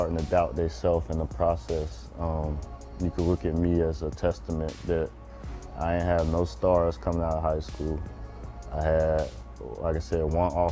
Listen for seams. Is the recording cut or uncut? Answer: uncut